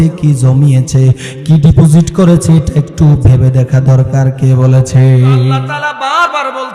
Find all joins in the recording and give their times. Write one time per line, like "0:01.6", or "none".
0:05.7